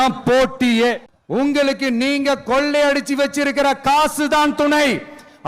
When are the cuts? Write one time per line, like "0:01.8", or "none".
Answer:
0:01.1